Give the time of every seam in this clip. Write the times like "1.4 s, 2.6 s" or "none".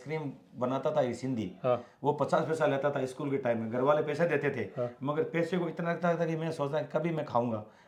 none